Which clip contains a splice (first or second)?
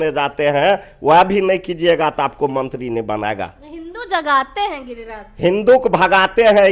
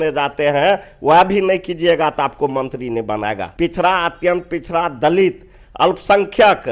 second